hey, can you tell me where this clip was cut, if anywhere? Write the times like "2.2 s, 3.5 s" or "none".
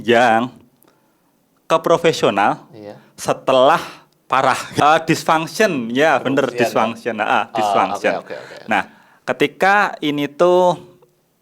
4.7 s